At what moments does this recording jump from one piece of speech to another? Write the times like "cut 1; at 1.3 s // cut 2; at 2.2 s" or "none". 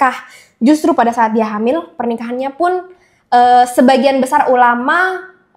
none